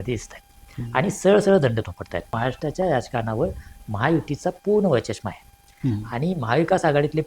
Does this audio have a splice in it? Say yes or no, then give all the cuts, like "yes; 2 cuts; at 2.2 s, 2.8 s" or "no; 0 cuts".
yes; 1 cut; at 2.3 s